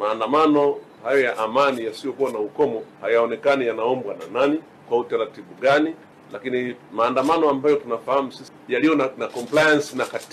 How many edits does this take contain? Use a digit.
2